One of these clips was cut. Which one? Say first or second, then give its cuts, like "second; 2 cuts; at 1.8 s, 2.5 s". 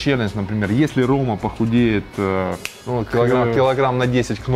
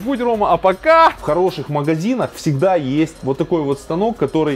second; 2 cuts; at 1.2 s, 3.2 s